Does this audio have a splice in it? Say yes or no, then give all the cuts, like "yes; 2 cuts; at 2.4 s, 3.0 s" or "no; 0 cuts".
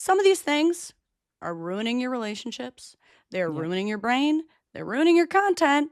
no; 0 cuts